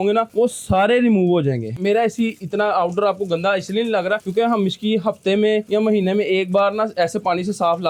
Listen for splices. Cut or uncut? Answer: uncut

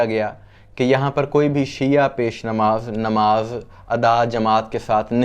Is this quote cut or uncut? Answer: uncut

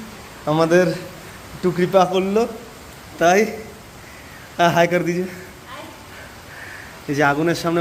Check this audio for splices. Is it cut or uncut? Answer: uncut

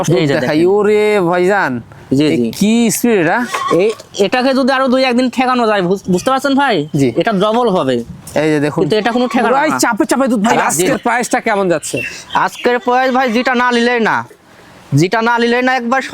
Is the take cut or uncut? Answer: cut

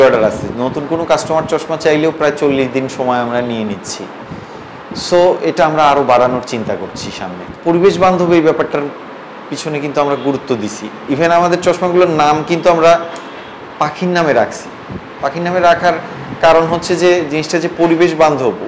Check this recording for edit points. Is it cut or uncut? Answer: uncut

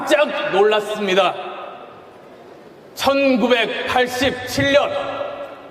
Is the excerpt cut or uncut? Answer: uncut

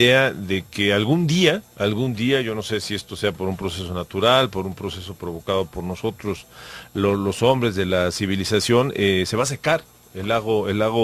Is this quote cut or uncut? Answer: cut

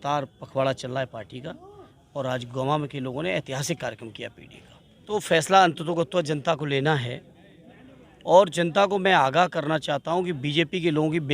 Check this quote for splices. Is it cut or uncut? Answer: cut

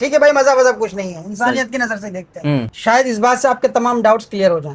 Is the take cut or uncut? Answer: cut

